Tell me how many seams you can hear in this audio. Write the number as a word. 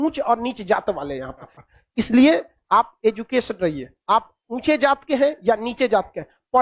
one